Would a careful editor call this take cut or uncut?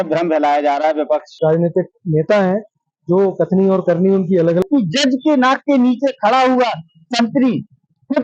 cut